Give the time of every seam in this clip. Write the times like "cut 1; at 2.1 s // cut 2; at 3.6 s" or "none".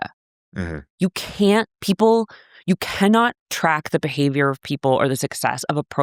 none

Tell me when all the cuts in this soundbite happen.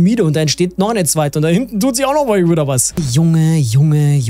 cut 1; at 3.1 s

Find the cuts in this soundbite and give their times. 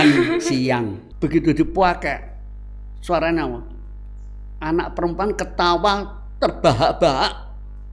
cut 1; at 1.0 s

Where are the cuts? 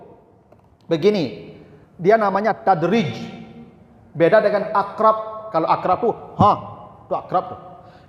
none

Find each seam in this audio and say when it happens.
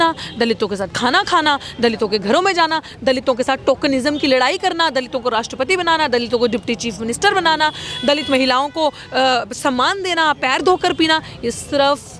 none

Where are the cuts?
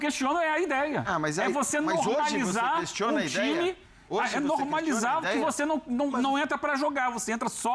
none

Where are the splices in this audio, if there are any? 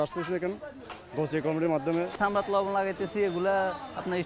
cut 1; at 2.1 s

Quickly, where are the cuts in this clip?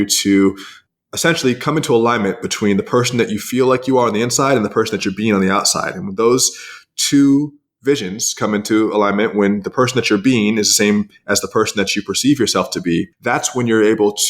cut 1; at 13.1 s

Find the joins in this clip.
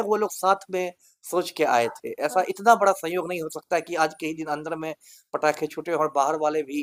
none

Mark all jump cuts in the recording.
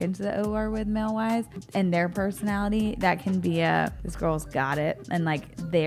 cut 1; at 1.6 s // cut 2; at 4.0 s

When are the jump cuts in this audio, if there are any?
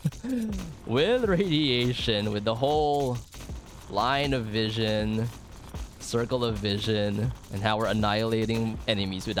none

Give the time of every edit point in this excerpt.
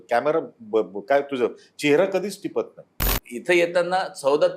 cut 1; at 3.1 s

